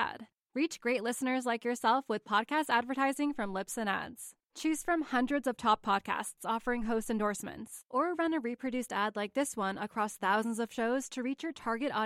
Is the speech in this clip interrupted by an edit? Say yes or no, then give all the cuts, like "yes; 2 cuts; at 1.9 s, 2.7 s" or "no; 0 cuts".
no; 0 cuts